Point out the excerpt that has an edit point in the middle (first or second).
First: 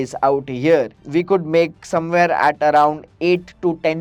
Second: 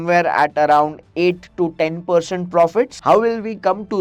second